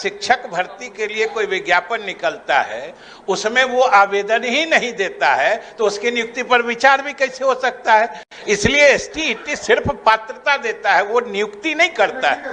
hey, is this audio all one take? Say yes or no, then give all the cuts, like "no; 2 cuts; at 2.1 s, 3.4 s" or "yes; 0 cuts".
yes; 0 cuts